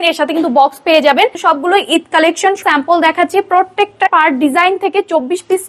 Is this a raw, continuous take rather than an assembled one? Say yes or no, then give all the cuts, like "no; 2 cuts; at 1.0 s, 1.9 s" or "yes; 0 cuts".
no; 3 cuts; at 1.4 s, 2.6 s, 4.1 s